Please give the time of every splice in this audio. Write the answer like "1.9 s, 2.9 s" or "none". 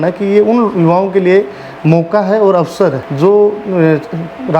3.1 s